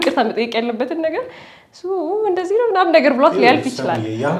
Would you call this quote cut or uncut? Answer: uncut